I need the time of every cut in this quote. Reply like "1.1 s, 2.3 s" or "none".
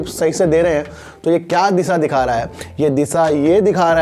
none

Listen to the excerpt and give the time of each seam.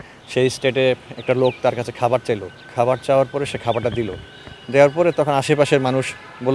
none

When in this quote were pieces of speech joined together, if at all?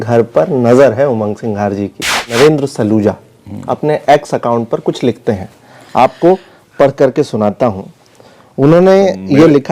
2.3 s

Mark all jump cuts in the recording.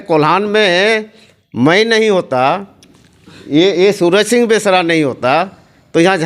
none

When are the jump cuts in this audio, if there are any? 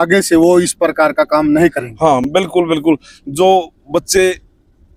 none

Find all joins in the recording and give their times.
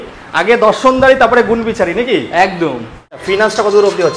3.1 s

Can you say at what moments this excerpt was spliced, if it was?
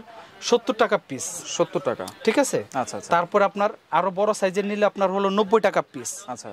none

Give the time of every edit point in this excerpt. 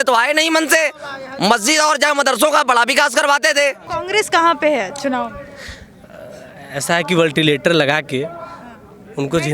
3.8 s

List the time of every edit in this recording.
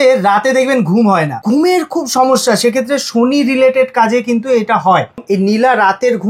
1.4 s, 5.2 s

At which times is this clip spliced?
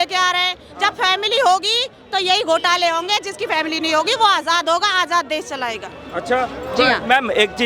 none

